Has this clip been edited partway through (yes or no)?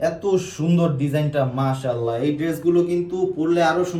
no